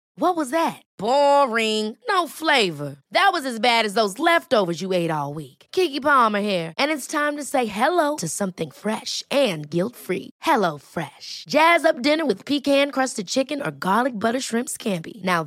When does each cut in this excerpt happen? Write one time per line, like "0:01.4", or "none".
none